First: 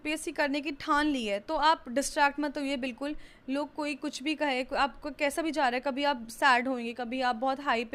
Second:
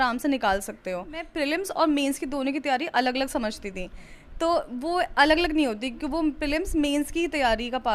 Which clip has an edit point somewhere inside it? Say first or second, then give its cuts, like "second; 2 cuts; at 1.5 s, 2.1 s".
second; 1 cut; at 1.3 s